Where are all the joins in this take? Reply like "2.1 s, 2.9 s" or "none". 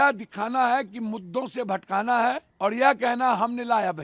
2.5 s